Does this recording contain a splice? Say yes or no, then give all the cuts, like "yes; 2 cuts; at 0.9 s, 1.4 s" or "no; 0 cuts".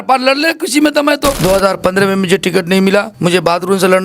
yes; 2 cuts; at 1.4 s, 3.1 s